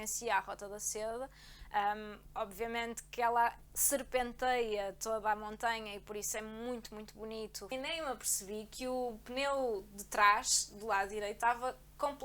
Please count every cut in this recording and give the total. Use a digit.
1